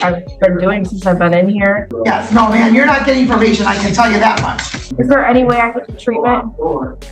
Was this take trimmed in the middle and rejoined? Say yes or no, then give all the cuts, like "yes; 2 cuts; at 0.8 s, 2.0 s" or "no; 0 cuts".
yes; 2 cuts; at 1.9 s, 4.9 s